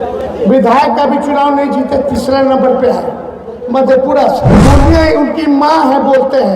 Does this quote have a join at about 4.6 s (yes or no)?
yes